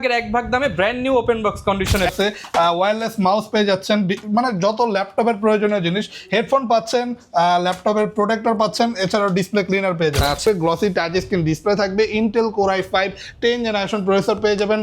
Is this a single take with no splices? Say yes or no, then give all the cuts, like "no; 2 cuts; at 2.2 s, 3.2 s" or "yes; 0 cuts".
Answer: no; 2 cuts; at 2.1 s, 10.4 s